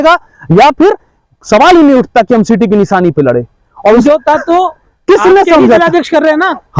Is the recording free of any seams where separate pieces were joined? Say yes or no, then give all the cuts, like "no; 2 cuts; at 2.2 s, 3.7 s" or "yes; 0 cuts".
no; 1 cut; at 4.0 s